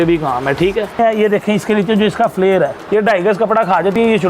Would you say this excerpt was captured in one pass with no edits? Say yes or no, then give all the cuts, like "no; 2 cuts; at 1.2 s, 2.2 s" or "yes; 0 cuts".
no; 2 cuts; at 1.0 s, 2.8 s